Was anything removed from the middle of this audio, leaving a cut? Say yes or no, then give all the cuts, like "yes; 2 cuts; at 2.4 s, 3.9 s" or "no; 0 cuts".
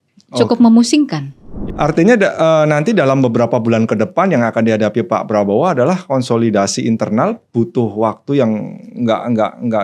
yes; 1 cut; at 1.6 s